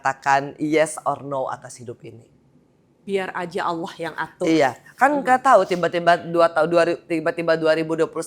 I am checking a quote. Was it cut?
no; 0 cuts

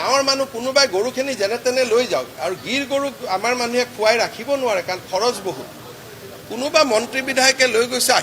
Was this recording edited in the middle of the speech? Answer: no; 0 cuts

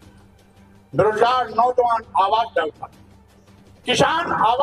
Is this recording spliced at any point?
yes; 1 cut; at 0.9 s

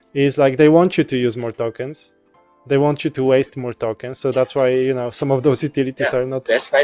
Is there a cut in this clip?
no; 0 cuts

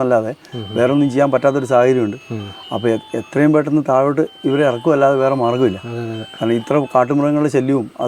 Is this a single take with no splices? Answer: yes; 0 cuts

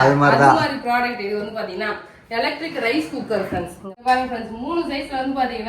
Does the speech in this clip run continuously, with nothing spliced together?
no; 1 cut; at 3.8 s

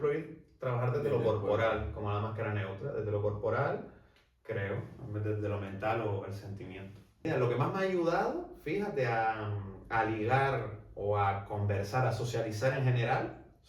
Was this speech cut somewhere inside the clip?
yes; 1 cut; at 7.2 s

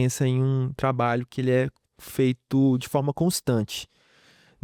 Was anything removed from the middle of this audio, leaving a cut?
no; 0 cuts

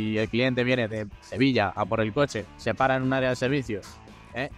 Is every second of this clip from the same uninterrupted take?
no; 1 cut; at 2.5 s

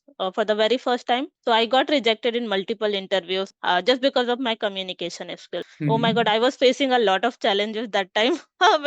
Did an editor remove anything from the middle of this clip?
yes; 3 cuts; at 1.3 s, 3.5 s, 5.7 s

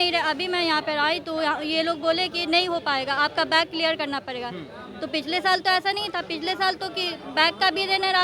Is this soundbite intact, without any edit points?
yes; 0 cuts

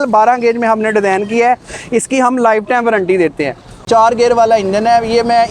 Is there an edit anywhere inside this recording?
yes; 1 cut; at 3.8 s

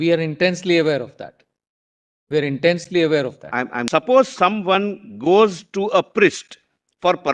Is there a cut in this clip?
yes; 1 cut; at 3.8 s

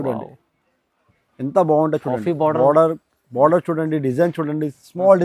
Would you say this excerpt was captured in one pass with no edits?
yes; 0 cuts

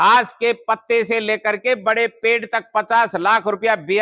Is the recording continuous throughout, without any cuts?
yes; 0 cuts

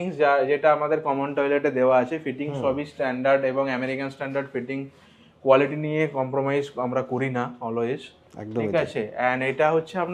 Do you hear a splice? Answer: no; 0 cuts

